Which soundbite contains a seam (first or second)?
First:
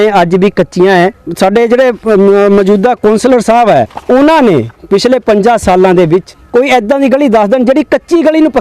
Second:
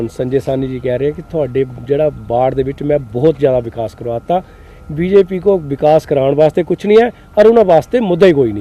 first